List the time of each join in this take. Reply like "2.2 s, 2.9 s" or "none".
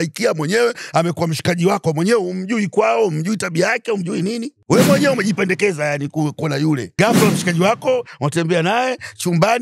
4.5 s, 6.9 s